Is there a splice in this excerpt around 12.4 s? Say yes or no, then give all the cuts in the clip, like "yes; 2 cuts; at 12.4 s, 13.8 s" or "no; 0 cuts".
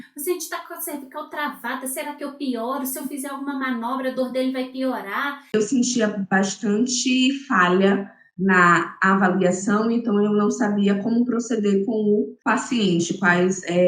yes; 2 cuts; at 5.5 s, 12.4 s